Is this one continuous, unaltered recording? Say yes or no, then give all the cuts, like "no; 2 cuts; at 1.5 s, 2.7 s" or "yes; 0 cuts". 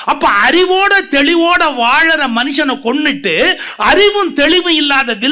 yes; 0 cuts